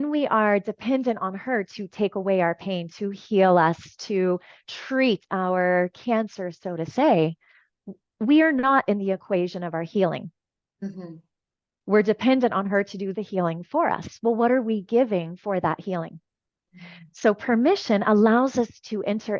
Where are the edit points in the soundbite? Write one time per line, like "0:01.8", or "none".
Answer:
none